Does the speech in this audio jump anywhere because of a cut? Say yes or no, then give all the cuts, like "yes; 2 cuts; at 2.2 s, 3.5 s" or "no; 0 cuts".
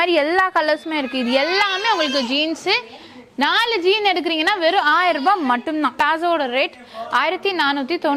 yes; 1 cut; at 5.9 s